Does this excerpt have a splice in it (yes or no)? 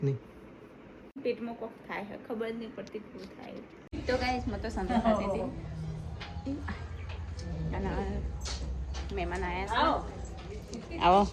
yes